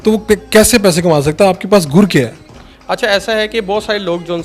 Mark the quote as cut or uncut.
uncut